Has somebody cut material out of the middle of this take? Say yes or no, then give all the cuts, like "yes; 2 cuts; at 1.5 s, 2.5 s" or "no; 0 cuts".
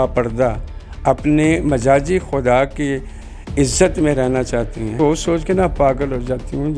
yes; 1 cut; at 4.9 s